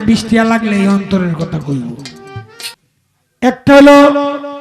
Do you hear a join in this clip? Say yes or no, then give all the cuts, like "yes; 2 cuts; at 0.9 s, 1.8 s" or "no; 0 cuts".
yes; 1 cut; at 2.7 s